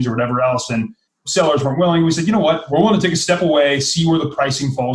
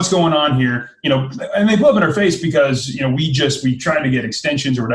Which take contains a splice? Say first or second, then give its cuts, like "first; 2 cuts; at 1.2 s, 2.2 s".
first; 2 cuts; at 1.2 s, 2.6 s